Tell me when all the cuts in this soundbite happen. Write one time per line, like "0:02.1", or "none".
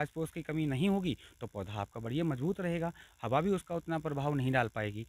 none